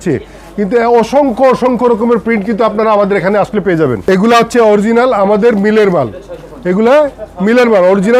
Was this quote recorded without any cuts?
no; 1 cut; at 4.0 s

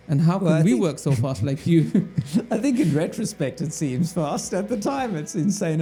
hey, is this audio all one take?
yes; 0 cuts

